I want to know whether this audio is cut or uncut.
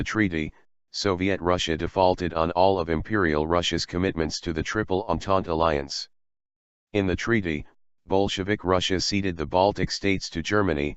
cut